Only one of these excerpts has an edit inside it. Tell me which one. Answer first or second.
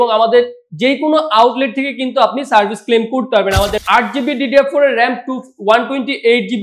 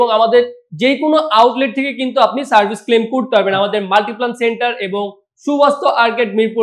first